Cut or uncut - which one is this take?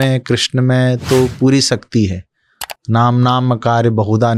uncut